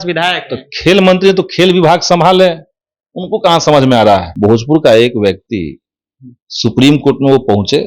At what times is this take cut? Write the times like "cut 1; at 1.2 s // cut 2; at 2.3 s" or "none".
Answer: cut 1; at 4.3 s